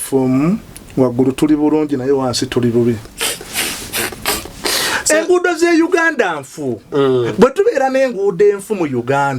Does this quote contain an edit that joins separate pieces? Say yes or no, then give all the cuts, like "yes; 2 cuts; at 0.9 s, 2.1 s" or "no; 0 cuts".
yes; 1 cut; at 3.1 s